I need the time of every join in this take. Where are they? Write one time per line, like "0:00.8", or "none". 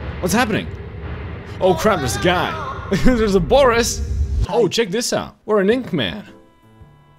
0:04.4